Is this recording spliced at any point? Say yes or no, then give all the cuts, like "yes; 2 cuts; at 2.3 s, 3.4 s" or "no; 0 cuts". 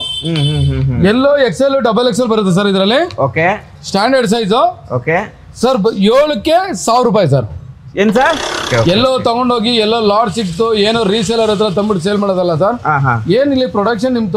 yes; 1 cut; at 8.7 s